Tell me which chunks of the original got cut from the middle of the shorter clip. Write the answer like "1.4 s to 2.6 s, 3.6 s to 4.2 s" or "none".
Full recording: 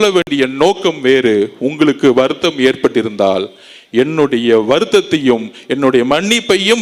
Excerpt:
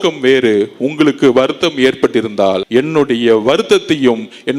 3.4 s to 3.9 s